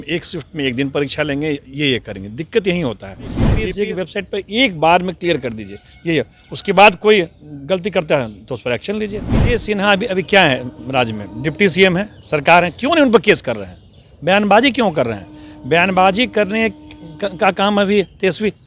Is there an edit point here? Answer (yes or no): yes